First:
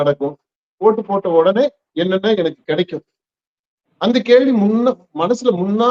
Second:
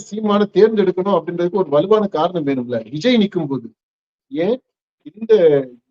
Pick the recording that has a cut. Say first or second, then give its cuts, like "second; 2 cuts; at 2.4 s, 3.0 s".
second; 1 cut; at 4.2 s